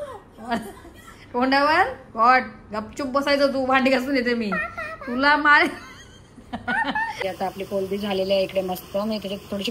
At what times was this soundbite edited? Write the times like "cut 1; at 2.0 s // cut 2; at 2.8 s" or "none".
cut 1; at 7.2 s